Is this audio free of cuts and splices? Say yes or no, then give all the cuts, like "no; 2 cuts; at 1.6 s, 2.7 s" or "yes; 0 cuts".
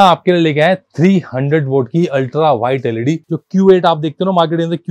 no; 1 cut; at 3.3 s